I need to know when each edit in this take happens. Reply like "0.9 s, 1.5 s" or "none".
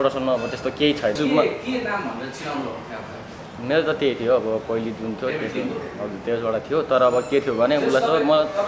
1.2 s